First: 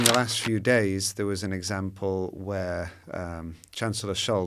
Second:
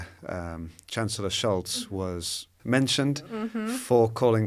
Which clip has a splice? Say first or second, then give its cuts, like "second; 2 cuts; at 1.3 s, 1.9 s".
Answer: second; 1 cut; at 2.5 s